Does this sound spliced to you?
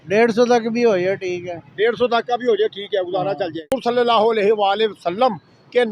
yes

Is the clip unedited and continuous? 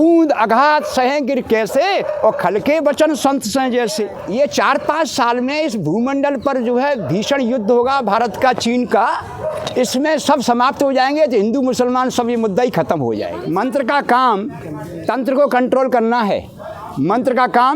no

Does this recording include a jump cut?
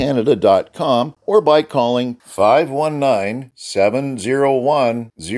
yes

